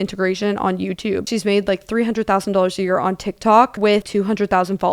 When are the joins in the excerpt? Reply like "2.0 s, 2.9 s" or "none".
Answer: 1.3 s, 4.0 s